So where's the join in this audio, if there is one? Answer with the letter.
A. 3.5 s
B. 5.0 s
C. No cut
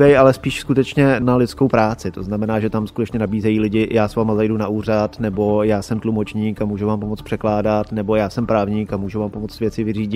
C